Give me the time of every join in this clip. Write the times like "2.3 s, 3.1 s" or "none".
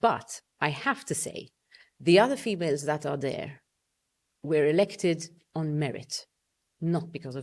none

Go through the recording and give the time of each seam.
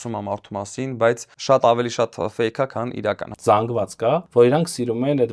1.3 s, 3.3 s, 4.3 s

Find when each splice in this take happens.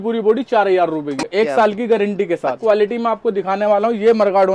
1.1 s, 2.6 s

